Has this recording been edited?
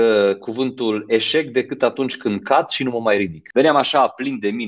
yes; 1 cut; at 3.4 s

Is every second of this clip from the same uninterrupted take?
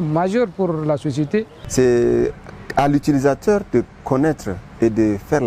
no; 1 cut; at 1.6 s

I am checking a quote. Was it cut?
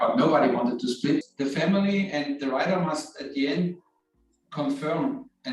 yes; 1 cut; at 1.3 s

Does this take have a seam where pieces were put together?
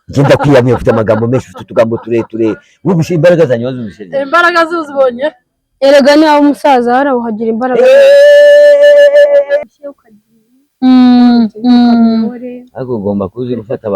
yes; 1 cut; at 9.7 s

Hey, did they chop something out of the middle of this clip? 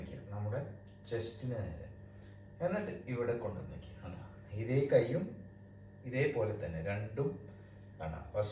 no; 0 cuts

